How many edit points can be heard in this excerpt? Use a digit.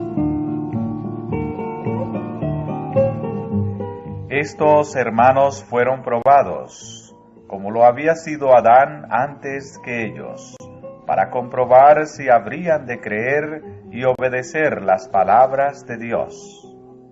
1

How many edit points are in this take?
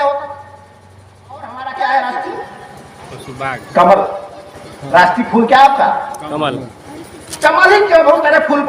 1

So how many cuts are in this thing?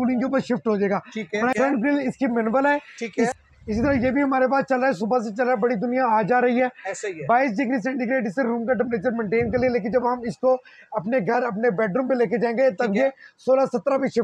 2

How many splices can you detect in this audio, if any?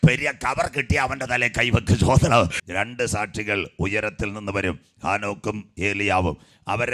1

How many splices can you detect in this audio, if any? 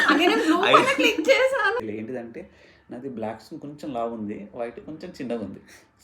1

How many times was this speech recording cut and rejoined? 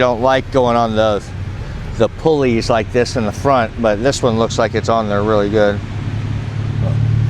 0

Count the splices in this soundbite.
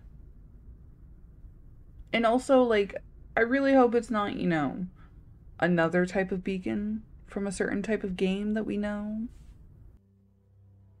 1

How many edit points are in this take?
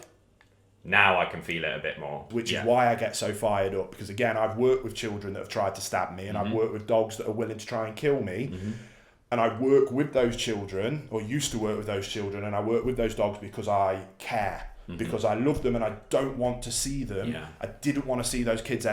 1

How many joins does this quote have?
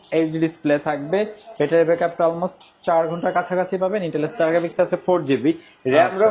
0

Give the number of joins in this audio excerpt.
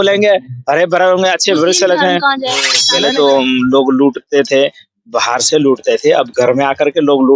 1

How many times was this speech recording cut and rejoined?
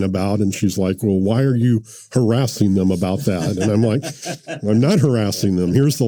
0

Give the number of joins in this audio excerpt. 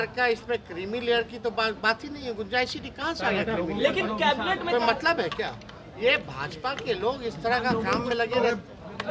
0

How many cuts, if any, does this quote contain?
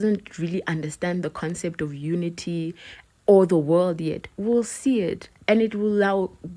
0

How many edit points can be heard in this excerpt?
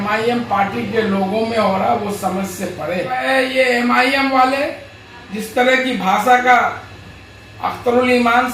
1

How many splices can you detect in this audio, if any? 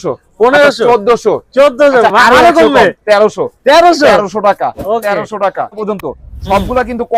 1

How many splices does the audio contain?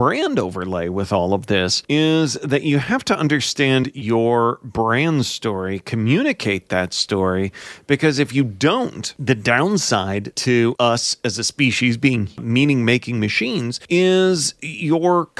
5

